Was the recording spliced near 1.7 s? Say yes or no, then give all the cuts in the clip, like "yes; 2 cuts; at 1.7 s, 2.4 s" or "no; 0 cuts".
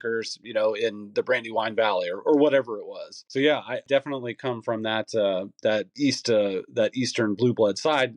no; 2 cuts; at 3.6 s, 5.9 s